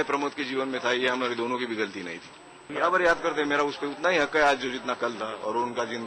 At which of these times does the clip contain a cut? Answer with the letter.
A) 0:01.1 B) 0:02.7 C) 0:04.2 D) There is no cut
B